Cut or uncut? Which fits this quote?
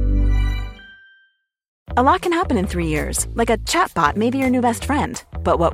cut